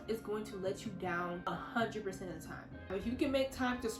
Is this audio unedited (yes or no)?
no